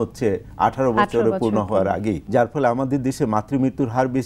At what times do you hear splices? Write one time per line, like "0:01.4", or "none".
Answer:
0:02.2